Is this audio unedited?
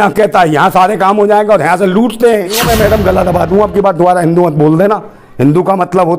no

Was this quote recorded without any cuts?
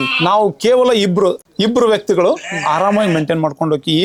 yes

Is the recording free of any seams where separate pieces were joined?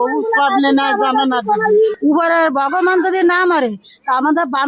no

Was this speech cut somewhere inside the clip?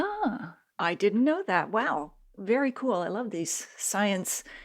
no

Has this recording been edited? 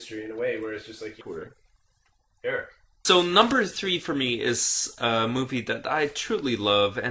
no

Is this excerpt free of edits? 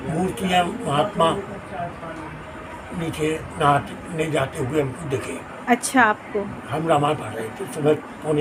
yes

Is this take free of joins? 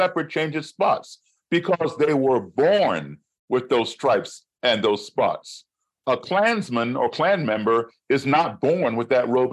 yes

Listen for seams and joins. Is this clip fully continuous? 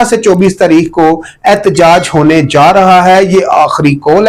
yes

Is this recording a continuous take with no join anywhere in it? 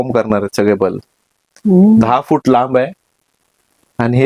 yes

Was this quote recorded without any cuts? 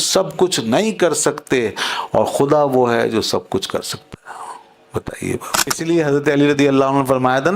no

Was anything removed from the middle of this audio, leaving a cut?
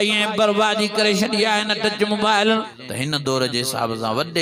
yes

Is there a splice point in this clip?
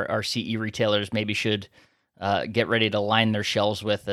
no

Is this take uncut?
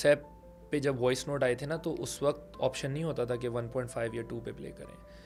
yes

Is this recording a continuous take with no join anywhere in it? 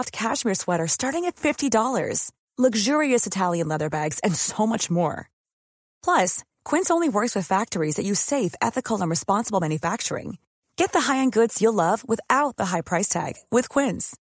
yes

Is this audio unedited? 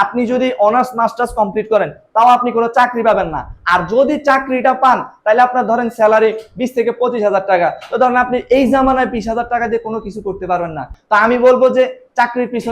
no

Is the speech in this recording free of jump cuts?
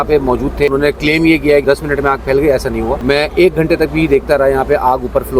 no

